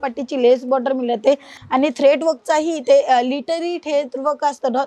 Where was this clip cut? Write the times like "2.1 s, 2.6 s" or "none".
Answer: 1.6 s